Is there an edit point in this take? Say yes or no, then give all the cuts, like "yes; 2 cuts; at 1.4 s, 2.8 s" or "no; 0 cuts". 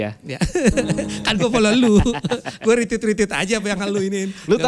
no; 0 cuts